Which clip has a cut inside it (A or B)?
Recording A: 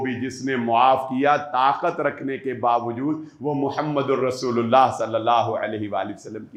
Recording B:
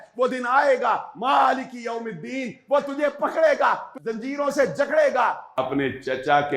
B